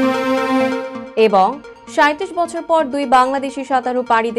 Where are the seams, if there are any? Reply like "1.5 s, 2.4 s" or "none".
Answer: none